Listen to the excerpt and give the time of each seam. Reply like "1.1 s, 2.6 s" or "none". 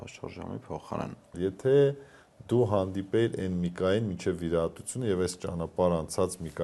1.3 s